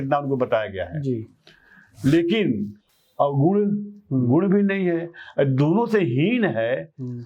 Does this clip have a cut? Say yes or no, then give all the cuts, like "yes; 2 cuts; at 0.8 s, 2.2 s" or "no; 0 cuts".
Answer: yes; 1 cut; at 2.8 s